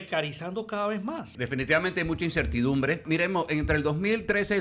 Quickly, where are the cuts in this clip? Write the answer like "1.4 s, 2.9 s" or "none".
1.3 s, 3.0 s

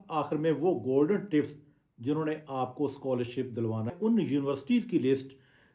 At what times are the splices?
3.9 s

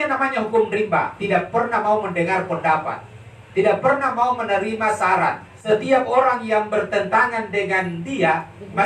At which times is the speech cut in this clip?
5.5 s

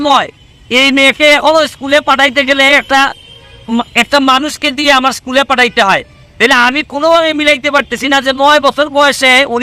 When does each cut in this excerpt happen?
none

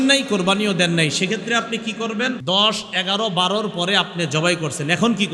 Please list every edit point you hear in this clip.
2.4 s

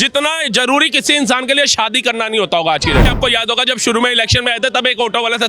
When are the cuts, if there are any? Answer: 3.1 s

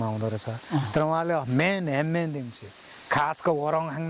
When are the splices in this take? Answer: none

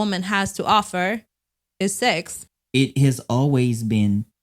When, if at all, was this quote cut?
2.4 s

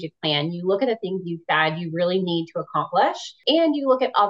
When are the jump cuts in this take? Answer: 3.4 s

